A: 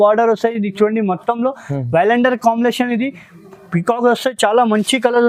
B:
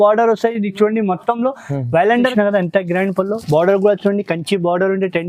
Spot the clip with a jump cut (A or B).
B